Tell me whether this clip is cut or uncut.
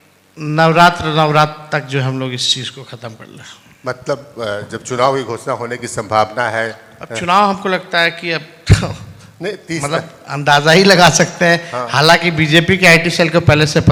uncut